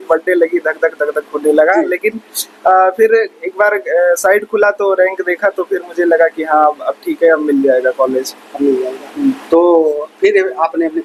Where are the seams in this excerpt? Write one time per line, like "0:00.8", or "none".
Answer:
none